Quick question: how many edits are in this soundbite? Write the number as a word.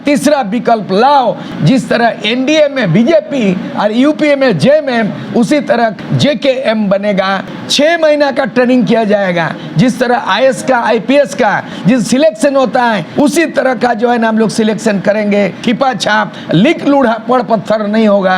six